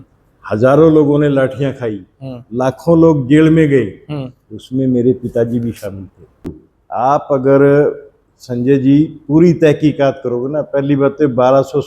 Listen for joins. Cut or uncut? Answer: cut